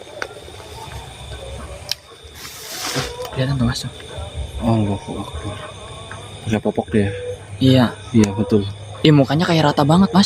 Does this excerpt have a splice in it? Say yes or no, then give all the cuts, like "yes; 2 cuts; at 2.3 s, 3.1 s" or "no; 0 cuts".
no; 0 cuts